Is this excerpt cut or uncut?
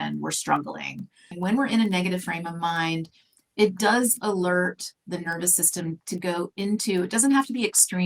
cut